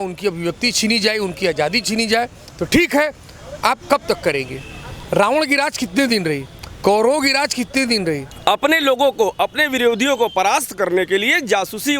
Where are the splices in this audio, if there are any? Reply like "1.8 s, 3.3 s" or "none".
none